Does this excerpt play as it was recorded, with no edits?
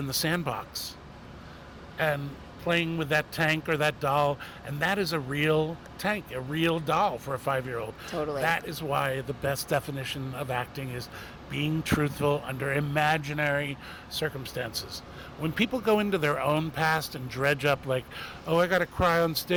yes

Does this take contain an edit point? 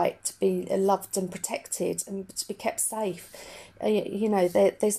no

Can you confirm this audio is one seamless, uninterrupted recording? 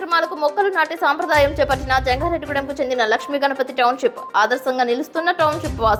yes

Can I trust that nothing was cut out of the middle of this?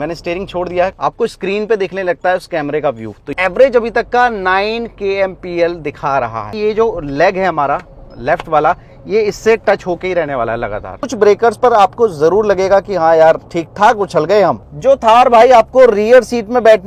no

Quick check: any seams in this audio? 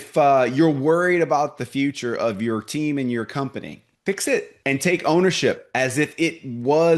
yes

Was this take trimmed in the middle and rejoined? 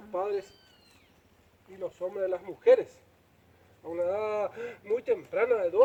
no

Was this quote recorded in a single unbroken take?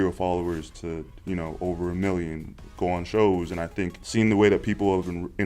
no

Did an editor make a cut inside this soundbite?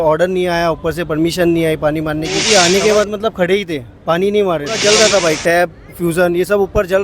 yes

